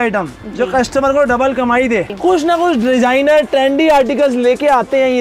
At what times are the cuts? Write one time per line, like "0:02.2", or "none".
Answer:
0:02.1